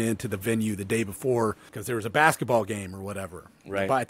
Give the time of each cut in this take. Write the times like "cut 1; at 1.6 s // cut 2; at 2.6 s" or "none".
cut 1; at 1.7 s

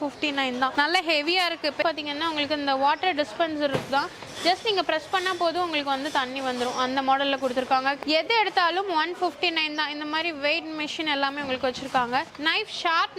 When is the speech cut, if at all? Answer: cut 1; at 1.8 s // cut 2; at 8.0 s

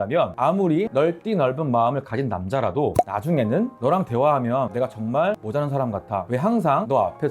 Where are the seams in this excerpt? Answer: none

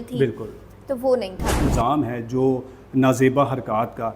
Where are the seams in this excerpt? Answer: cut 1; at 1.7 s

